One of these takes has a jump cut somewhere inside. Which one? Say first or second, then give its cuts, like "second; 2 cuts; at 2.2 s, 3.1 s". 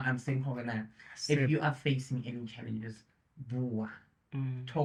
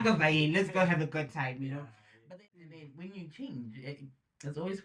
second; 1 cut; at 2.2 s